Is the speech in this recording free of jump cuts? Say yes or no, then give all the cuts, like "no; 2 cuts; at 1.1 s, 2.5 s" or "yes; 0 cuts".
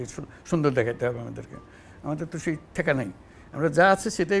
yes; 0 cuts